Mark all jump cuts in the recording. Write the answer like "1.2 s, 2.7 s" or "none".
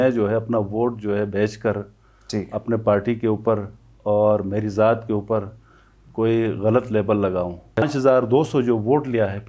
7.9 s